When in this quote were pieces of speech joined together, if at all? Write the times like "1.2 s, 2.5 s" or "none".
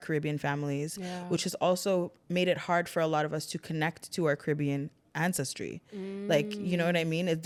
none